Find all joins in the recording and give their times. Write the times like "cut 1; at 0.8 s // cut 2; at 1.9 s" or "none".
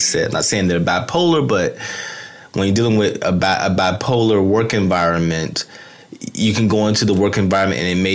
none

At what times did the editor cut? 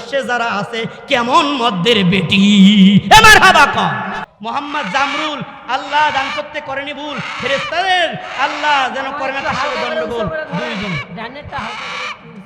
cut 1; at 4.2 s

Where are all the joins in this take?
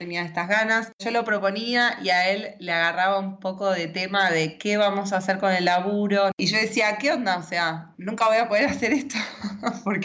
cut 1; at 1.0 s // cut 2; at 6.3 s

